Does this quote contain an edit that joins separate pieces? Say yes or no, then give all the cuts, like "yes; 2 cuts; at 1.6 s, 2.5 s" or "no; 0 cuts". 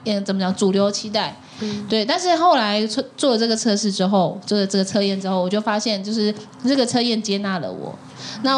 no; 0 cuts